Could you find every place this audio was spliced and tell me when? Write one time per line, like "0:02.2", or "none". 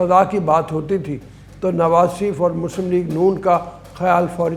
none

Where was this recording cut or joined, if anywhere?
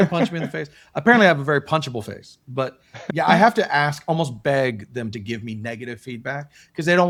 none

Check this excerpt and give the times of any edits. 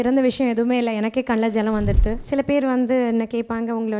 0:02.2

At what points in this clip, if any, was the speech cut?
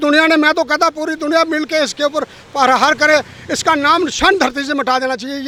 none

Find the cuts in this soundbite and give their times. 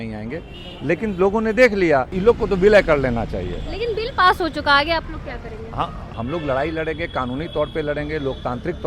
0:02.1
0:06.0

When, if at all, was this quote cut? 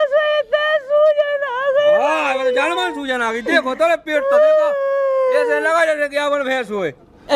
none

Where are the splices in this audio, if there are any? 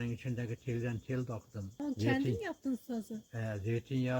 0:01.7

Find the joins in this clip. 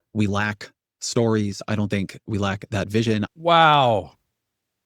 0:03.3

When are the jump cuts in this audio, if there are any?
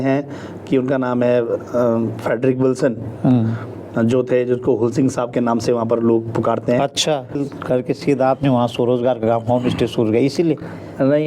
0:07.4

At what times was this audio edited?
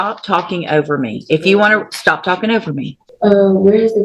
0:03.0

